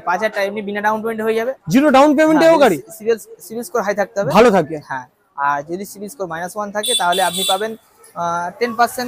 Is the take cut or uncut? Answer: uncut